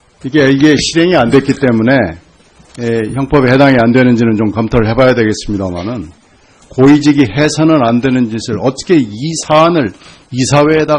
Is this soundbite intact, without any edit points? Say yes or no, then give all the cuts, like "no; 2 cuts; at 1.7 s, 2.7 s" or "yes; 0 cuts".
no; 1 cut; at 6.6 s